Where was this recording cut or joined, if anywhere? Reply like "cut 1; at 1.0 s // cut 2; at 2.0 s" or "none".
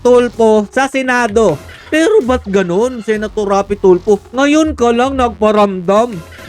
cut 1; at 1.8 s

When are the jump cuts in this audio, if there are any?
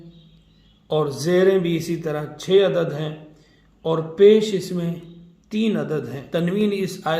cut 1; at 6.2 s

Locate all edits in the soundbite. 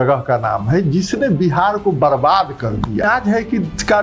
cut 1; at 3.0 s

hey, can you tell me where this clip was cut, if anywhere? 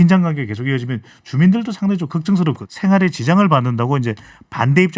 cut 1; at 2.6 s

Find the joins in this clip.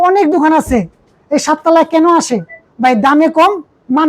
none

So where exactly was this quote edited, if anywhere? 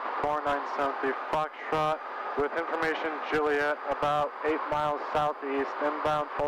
none

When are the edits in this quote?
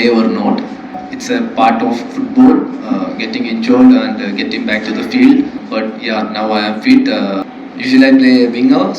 cut 1; at 1.1 s // cut 2; at 5.6 s // cut 3; at 7.5 s

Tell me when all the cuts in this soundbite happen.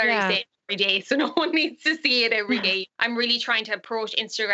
cut 1; at 2.9 s

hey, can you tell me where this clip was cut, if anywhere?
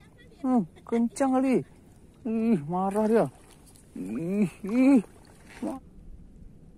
cut 1; at 5.7 s

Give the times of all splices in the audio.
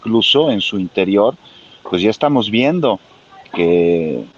none

